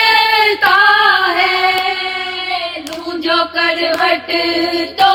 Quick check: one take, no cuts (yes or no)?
yes